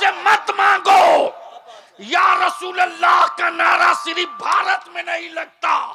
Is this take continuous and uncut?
yes; 0 cuts

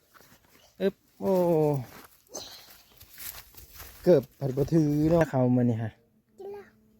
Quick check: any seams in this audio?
yes; 1 cut; at 5.2 s

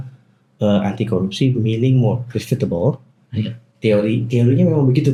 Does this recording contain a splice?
no; 0 cuts

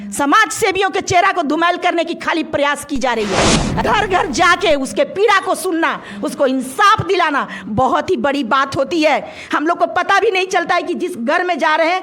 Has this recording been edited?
yes; 1 cut; at 3.8 s

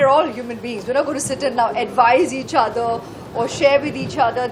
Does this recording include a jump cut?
no; 0 cuts

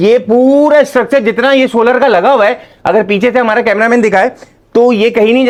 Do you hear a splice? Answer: no; 0 cuts

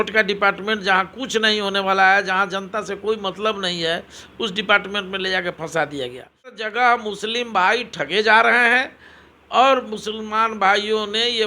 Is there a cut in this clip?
yes; 1 cut; at 6.6 s

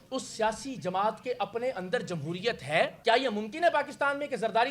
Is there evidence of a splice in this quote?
yes; 1 cut; at 3.0 s

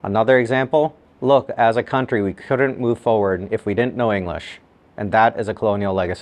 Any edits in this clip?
yes; 1 cut; at 1.1 s

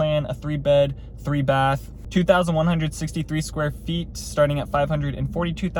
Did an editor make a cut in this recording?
no; 0 cuts

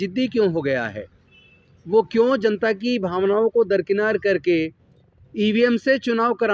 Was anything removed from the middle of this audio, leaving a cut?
no; 0 cuts

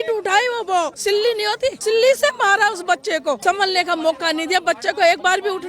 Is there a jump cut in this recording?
yes; 2 cuts; at 1.3 s, 3.4 s

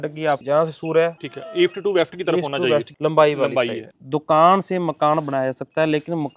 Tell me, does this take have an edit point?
yes; 3 cuts; at 1.3 s, 2.9 s, 3.9 s

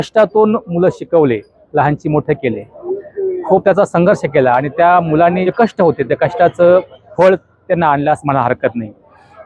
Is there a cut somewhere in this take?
yes; 2 cuts; at 5.4 s, 7.0 s

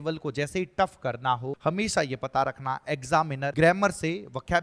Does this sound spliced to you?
yes; 2 cuts; at 1.5 s, 3.5 s

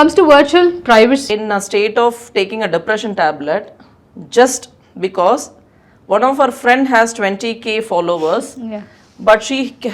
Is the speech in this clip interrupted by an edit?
yes; 1 cut; at 1.2 s

